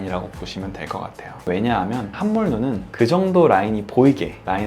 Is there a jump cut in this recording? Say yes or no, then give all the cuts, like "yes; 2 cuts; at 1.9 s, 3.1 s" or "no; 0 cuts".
yes; 1 cut; at 2.1 s